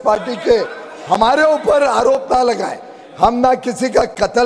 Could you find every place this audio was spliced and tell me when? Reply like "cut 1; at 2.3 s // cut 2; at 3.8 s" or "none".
none

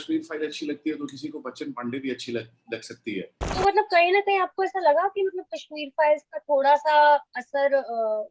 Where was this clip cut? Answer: cut 1; at 3.4 s

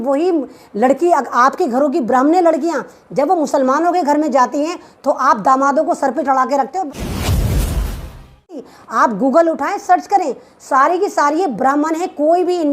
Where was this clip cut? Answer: cut 1; at 6.9 s // cut 2; at 8.6 s

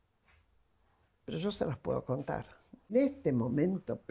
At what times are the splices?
cut 1; at 2.9 s

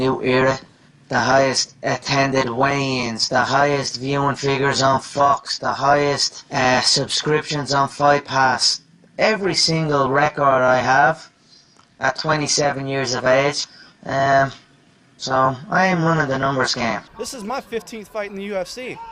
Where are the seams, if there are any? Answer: cut 1; at 17.9 s

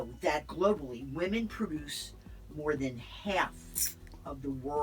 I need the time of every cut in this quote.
none

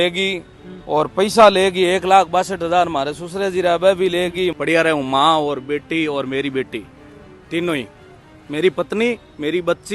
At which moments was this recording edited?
cut 1; at 4.5 s

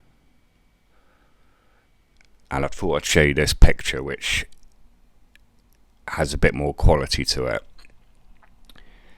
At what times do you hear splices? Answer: cut 1; at 2.3 s

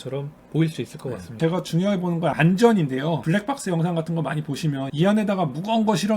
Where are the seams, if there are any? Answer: cut 1; at 1.4 s // cut 2; at 2.3 s // cut 3; at 3.2 s // cut 4; at 4.9 s

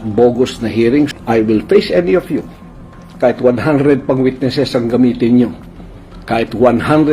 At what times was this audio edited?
cut 1; at 1.1 s

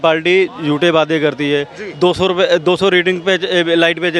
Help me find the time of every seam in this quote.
none

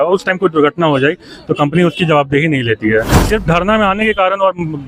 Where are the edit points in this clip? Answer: cut 1; at 3.1 s

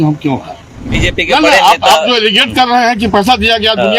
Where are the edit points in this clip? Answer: cut 1; at 1.0 s

